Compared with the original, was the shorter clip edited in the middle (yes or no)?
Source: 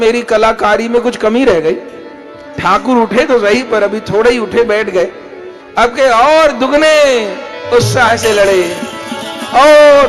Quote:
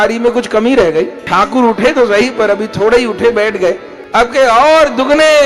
yes